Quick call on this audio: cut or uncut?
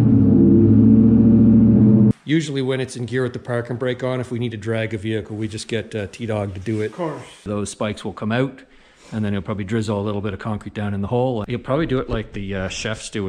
cut